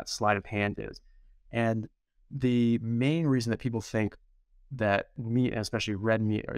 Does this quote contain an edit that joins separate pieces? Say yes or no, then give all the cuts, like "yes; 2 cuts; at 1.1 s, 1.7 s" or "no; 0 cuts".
no; 0 cuts